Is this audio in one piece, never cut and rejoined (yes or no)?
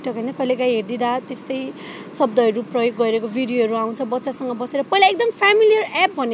yes